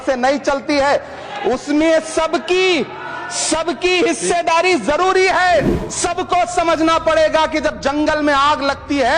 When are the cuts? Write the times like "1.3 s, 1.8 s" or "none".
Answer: 5.8 s